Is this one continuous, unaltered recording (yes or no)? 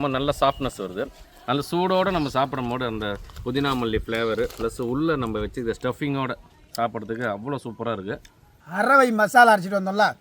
yes